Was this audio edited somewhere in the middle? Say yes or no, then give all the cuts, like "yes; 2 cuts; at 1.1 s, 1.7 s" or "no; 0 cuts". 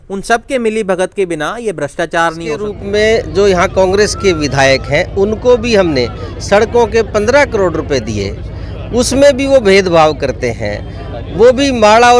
yes; 1 cut; at 2.8 s